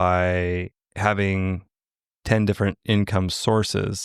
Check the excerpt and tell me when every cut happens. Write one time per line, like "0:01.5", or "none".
none